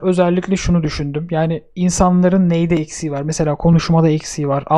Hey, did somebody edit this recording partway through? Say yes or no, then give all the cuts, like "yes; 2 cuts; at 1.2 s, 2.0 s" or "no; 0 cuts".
no; 0 cuts